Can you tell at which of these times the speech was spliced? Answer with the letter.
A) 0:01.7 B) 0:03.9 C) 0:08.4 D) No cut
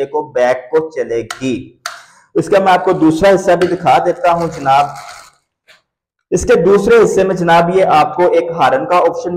D